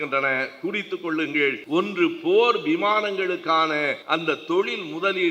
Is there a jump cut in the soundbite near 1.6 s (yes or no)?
yes